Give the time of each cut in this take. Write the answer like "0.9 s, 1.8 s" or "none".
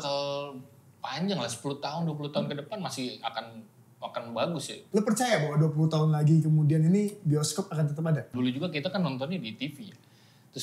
4.8 s, 8.3 s